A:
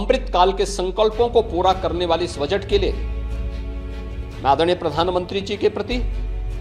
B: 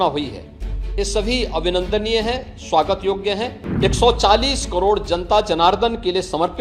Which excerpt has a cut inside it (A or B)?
B